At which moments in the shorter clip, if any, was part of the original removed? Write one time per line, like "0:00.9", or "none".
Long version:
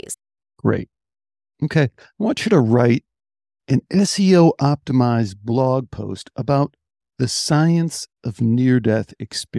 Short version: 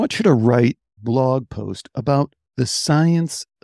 0:01.0
0:02.4